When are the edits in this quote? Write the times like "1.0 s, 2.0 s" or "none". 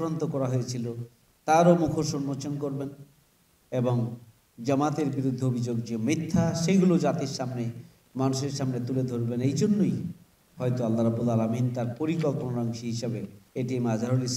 13.3 s